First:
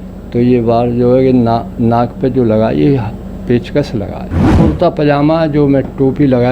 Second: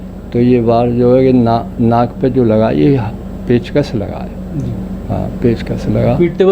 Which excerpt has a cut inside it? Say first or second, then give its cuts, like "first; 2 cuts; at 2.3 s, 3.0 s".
first; 1 cut; at 4.5 s